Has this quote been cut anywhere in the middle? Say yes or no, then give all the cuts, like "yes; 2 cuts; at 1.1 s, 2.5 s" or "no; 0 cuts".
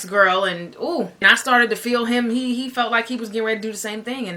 yes; 1 cut; at 1.2 s